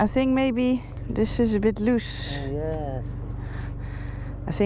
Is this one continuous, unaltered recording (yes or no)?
no